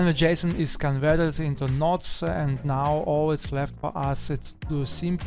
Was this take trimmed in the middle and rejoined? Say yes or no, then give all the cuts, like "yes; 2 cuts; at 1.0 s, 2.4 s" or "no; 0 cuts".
no; 0 cuts